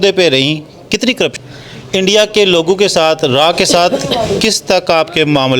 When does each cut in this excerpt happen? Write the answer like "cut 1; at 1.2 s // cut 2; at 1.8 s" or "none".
cut 1; at 1.4 s